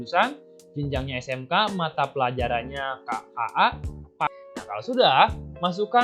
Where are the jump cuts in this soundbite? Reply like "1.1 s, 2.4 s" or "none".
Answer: 4.3 s